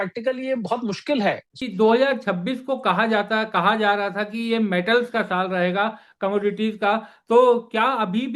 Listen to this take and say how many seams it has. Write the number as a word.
one